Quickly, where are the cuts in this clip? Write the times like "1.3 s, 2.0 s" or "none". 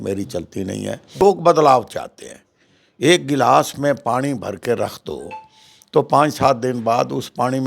1.2 s